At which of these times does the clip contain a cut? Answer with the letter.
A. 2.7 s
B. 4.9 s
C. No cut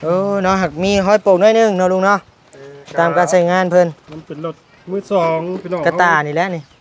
C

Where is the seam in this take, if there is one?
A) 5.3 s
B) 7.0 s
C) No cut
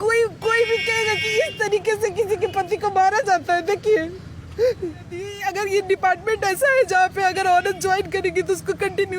A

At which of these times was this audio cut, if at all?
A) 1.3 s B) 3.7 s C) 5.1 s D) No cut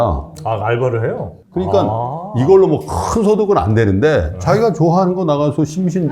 A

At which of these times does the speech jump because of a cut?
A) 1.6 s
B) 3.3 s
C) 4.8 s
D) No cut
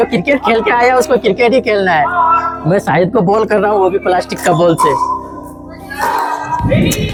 D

